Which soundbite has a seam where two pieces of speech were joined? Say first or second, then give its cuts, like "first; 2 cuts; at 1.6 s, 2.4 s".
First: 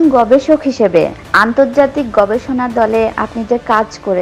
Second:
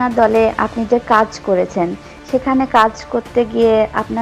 first; 1 cut; at 1.2 s